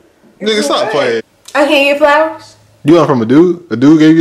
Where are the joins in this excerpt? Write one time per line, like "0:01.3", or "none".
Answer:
0:01.2